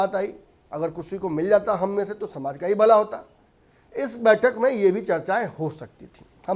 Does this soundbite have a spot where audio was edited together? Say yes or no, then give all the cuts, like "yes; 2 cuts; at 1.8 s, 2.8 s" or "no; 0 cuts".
no; 0 cuts